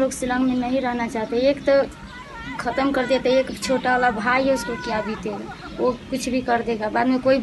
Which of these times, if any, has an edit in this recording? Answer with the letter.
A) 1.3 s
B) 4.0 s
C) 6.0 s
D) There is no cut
D